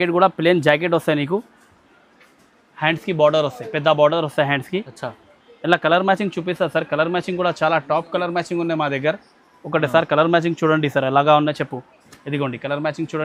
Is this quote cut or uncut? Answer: uncut